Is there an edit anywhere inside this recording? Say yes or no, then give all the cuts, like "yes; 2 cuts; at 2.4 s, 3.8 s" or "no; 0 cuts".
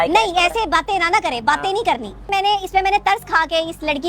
yes; 1 cut; at 2.3 s